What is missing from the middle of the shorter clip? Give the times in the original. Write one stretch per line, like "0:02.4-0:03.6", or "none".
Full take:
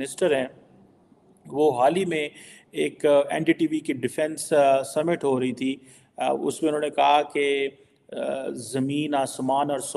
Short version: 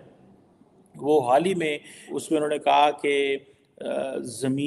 0:02.7-0:06.5